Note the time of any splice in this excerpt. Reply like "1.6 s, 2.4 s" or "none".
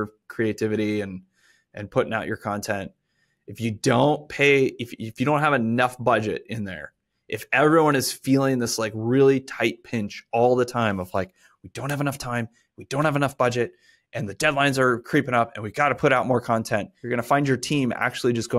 17.0 s